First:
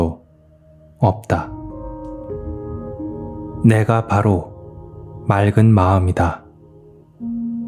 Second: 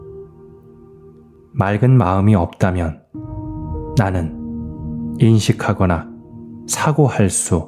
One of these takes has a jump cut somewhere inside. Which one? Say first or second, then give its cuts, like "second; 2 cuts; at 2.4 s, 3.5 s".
second; 1 cut; at 1.4 s